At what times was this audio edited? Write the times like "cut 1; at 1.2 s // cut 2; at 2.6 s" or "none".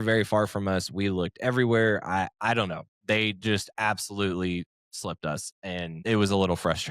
cut 1; at 5.9 s